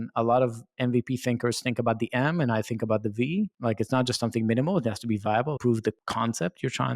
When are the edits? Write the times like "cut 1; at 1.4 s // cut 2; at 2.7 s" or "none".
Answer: cut 1; at 3.5 s // cut 2; at 5.7 s